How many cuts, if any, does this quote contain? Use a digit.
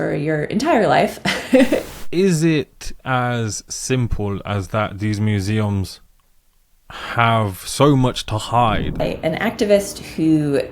2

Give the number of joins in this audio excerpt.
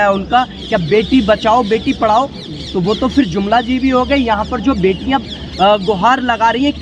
0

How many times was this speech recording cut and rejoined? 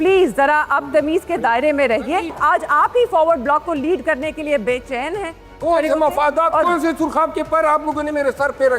2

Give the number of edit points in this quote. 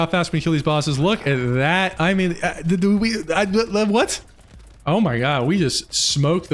0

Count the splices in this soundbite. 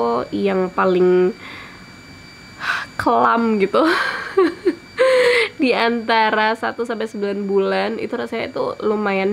0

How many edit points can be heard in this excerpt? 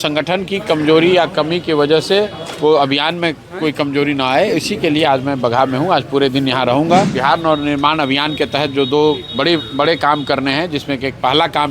1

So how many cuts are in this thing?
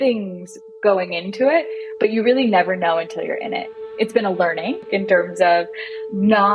2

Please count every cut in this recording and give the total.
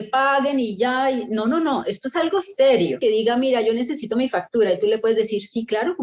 1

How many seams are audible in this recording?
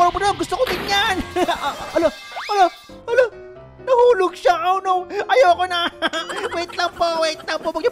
0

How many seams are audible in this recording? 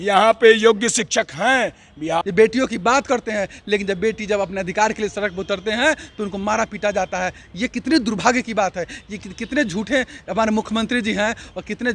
1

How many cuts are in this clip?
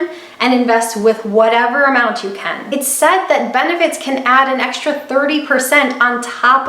1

